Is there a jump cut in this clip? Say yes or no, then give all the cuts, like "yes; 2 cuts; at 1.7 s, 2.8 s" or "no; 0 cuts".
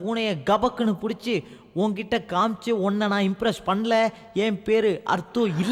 no; 0 cuts